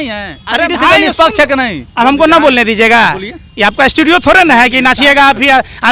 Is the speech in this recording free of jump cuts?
yes; 0 cuts

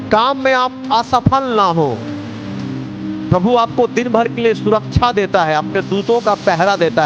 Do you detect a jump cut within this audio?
no; 0 cuts

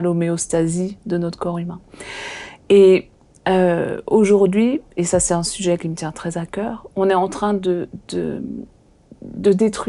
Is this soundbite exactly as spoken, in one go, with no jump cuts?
yes; 0 cuts

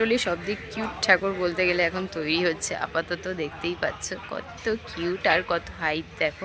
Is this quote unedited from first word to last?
yes; 0 cuts

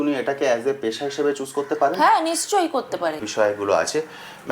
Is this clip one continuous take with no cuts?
no; 1 cut; at 3.3 s

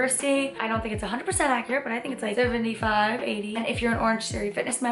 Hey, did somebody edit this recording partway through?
yes; 1 cut; at 3.6 s

